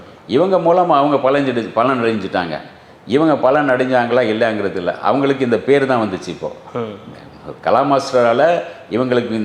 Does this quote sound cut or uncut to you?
uncut